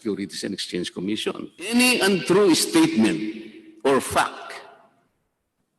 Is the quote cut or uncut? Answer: cut